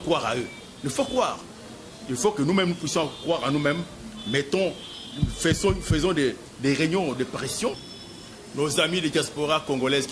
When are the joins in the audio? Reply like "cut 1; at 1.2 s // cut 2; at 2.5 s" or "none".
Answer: cut 1; at 7.9 s